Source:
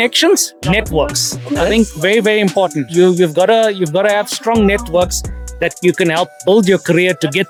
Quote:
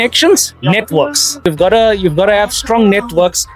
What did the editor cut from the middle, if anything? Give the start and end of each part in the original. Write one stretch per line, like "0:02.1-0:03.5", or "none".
0:01.5-0:03.2

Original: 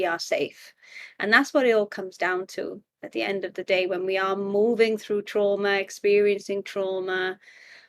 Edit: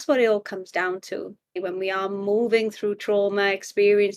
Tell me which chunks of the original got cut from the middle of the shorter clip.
0:03.0-0:03.8

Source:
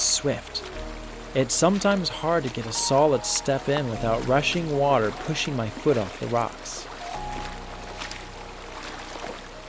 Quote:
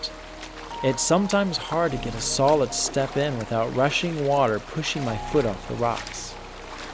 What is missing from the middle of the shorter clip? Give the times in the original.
0:06.5-0:08.0

